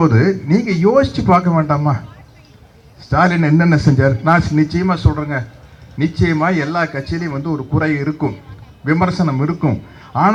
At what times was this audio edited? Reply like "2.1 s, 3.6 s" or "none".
none